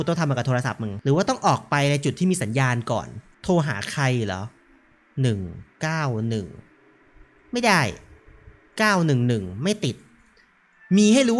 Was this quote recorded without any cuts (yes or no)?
yes